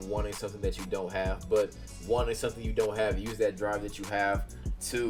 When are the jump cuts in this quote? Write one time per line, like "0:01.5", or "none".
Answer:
none